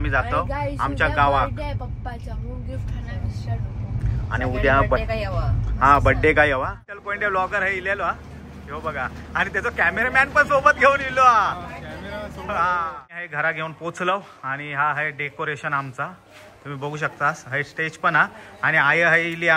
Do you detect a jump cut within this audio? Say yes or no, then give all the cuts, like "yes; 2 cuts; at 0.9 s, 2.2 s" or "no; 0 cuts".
yes; 2 cuts; at 7.1 s, 13.1 s